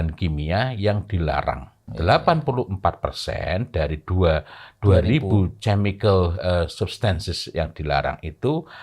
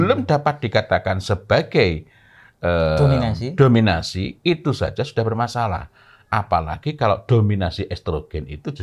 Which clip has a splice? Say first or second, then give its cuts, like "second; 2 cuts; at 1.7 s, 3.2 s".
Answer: first; 1 cut; at 1.8 s